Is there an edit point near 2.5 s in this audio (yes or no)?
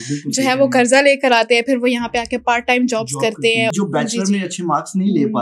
no